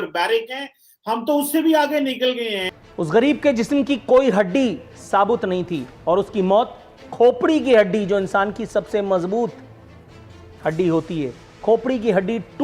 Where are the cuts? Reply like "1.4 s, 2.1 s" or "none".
2.8 s